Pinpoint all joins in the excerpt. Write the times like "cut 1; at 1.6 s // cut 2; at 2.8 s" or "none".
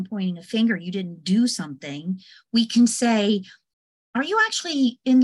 none